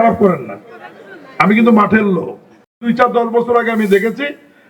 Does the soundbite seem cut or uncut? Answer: cut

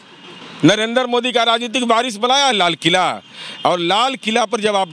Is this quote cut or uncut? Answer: uncut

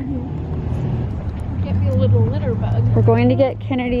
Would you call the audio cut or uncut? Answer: cut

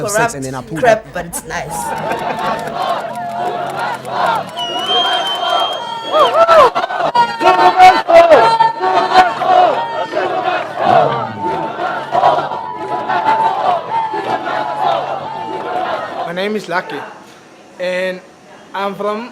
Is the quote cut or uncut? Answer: cut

